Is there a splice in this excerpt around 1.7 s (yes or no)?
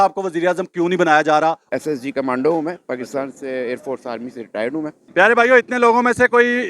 yes